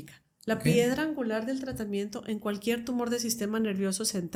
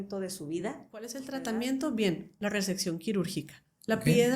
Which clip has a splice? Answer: second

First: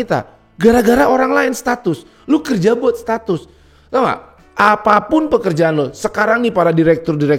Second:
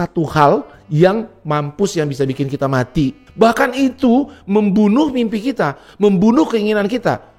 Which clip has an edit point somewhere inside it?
second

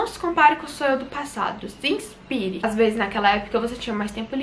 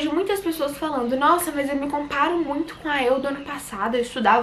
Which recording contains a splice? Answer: first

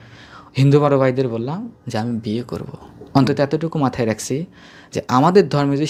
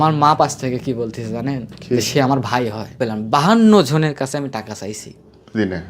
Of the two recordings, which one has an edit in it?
second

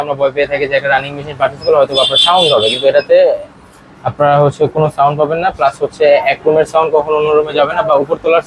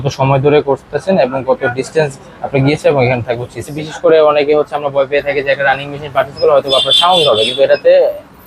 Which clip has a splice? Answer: second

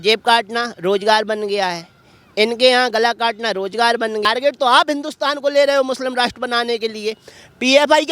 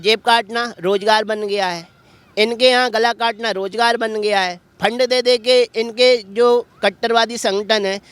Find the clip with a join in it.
first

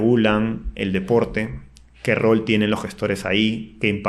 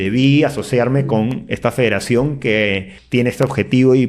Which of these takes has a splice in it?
second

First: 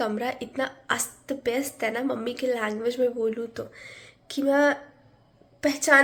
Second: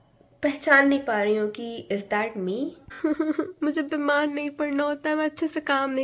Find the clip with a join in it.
second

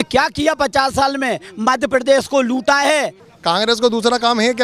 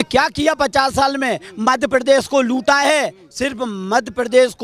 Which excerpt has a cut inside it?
first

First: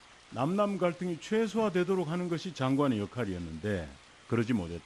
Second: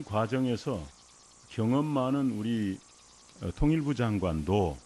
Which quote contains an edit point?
first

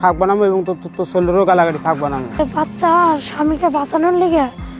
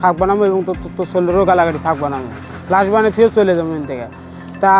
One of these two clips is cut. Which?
first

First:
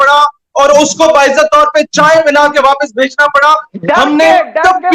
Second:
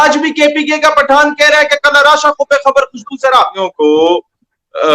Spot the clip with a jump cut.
second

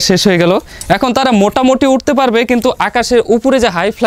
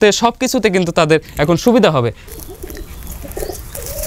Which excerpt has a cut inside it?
second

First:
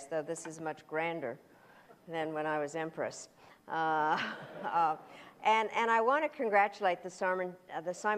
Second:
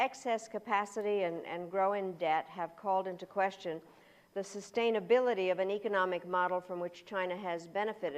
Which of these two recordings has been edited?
second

